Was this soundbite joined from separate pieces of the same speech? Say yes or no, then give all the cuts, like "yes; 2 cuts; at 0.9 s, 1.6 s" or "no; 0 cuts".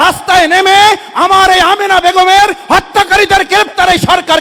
no; 0 cuts